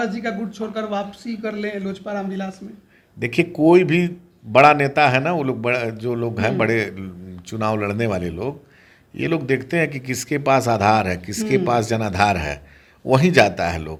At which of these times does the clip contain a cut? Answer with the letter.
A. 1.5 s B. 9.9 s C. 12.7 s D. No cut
D